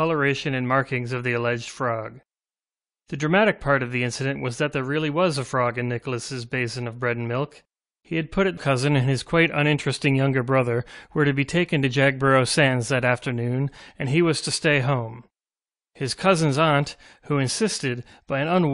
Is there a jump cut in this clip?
no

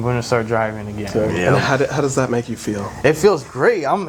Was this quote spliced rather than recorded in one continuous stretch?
no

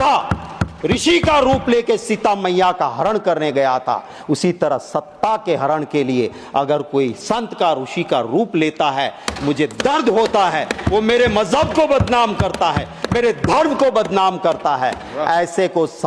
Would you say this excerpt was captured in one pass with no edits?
yes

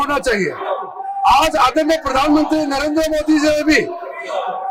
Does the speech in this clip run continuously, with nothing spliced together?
yes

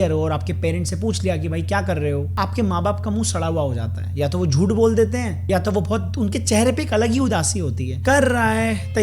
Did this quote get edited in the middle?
yes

